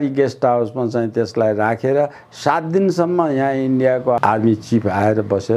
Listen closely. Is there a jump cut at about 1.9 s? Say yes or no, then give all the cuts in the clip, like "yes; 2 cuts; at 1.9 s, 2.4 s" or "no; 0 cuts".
no; 1 cut; at 4.2 s